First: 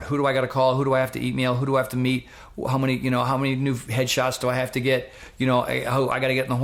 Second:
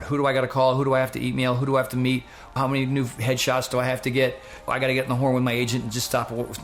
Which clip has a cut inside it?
second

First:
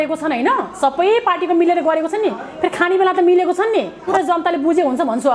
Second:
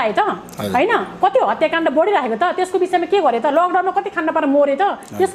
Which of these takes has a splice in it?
first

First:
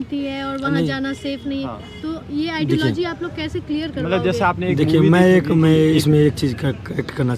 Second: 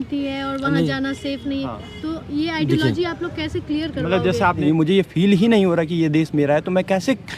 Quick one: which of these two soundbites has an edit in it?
second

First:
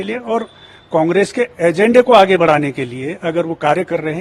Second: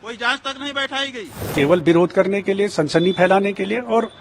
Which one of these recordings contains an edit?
second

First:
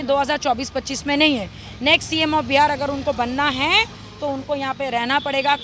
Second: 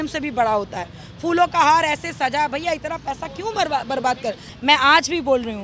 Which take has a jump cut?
second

